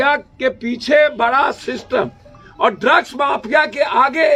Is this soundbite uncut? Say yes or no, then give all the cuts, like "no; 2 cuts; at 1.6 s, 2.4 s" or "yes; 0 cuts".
yes; 0 cuts